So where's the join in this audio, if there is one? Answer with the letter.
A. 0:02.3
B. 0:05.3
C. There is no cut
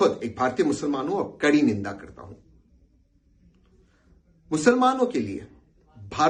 C